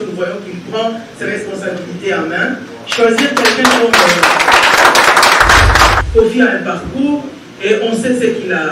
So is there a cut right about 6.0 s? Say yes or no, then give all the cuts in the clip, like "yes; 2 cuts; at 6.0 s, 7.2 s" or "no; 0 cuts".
yes; 1 cut; at 6.0 s